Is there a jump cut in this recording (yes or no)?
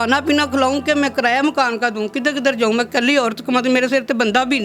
no